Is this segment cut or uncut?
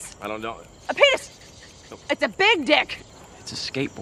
cut